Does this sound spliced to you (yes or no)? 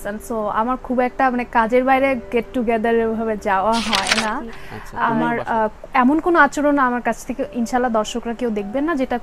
yes